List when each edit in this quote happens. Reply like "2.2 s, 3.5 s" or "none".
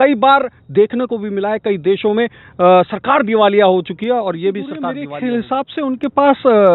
5.0 s